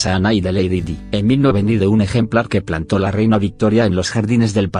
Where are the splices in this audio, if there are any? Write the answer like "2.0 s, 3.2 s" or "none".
none